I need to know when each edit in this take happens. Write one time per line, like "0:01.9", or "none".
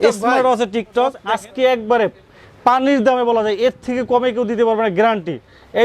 0:01.2